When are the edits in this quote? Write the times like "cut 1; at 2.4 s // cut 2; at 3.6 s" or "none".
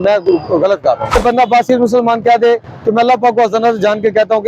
cut 1; at 1.2 s